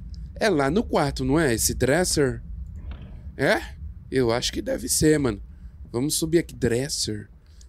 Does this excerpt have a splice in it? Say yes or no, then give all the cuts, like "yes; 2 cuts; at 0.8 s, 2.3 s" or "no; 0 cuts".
no; 0 cuts